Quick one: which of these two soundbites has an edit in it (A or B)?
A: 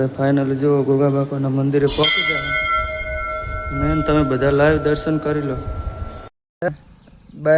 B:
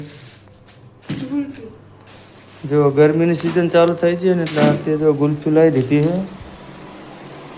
A